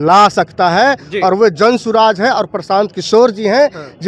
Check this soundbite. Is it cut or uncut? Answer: uncut